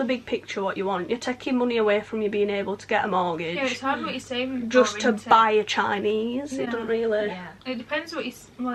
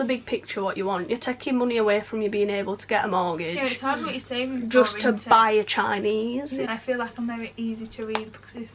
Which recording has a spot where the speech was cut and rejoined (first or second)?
second